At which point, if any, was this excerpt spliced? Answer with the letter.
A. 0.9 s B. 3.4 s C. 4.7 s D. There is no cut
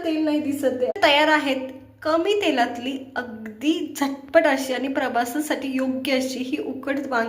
A